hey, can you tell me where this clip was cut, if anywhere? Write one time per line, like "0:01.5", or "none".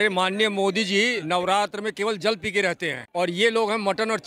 0:01.2